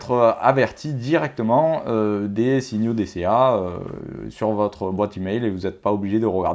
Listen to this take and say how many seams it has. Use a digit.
0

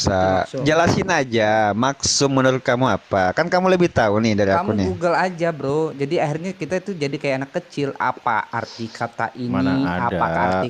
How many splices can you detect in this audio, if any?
0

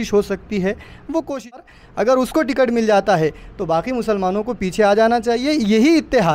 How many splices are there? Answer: 1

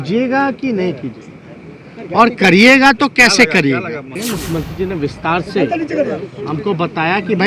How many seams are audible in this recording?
1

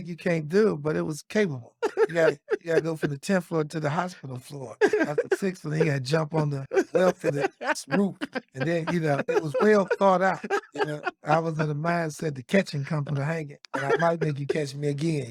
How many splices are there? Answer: 0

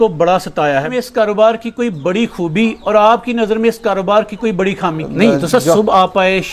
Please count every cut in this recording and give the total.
2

